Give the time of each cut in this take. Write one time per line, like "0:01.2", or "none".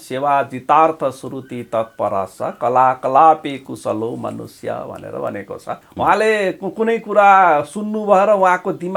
0:05.8